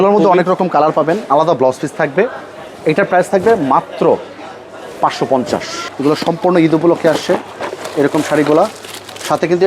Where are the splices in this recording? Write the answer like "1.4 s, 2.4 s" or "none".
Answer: 1.2 s, 5.8 s